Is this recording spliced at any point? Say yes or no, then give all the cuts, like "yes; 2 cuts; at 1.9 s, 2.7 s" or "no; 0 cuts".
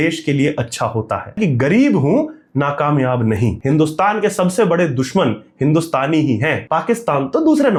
no; 0 cuts